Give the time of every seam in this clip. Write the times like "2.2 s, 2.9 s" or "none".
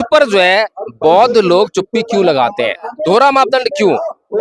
2.9 s